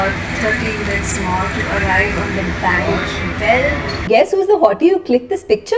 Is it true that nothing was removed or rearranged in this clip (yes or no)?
no